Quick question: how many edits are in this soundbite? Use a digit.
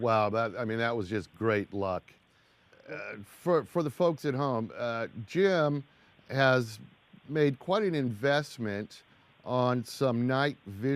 1